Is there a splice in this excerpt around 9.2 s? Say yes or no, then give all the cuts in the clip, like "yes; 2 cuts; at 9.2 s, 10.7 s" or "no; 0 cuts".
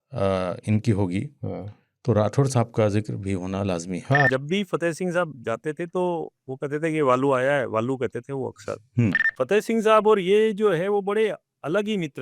yes; 2 cuts; at 4.3 s, 9.2 s